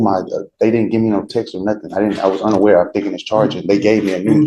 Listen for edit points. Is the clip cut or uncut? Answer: uncut